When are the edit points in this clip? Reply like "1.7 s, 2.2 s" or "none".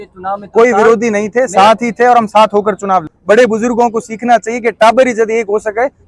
3.1 s